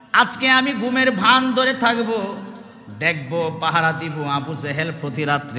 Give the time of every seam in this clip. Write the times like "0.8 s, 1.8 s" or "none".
none